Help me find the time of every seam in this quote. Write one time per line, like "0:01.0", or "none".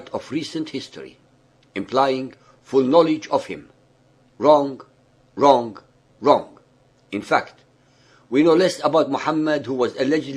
0:09.1